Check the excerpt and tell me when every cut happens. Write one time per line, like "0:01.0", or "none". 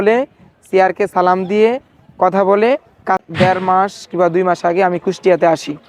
0:03.2